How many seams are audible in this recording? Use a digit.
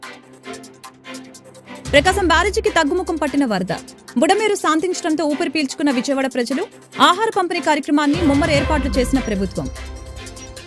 1